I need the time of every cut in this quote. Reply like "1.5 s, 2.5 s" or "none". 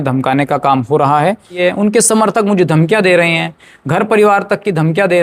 1.6 s